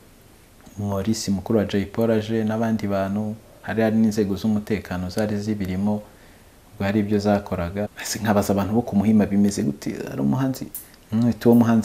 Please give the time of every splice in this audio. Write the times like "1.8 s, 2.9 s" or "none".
8.0 s